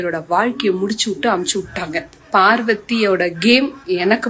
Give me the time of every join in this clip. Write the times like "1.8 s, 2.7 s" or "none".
2.1 s